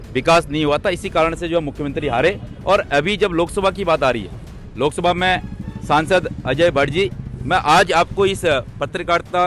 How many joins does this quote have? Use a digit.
0